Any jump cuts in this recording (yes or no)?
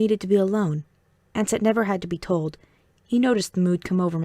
yes